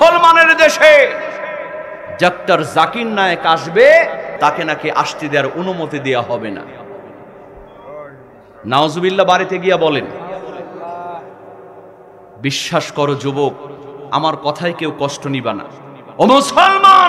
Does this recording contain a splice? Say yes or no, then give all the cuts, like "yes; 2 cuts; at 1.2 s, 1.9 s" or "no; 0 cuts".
yes; 1 cut; at 4.3 s